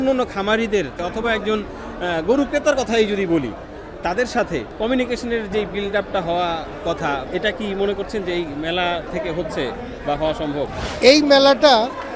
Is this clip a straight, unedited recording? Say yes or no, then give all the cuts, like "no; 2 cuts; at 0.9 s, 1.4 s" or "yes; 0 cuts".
no; 5 cuts; at 1.0 s, 4.7 s, 7.2 s, 9.1 s, 10.8 s